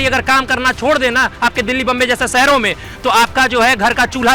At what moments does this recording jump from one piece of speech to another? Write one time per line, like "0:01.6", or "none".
none